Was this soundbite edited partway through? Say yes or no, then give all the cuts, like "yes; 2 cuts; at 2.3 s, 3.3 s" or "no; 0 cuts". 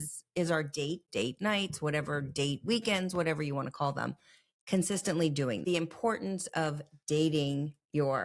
yes; 2 cuts; at 1.1 s, 5.6 s